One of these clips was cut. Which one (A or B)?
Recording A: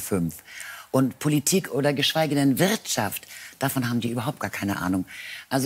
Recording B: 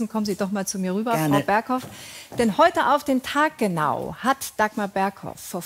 A